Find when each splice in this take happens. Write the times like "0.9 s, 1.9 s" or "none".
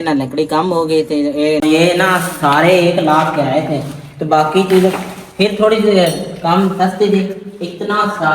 1.6 s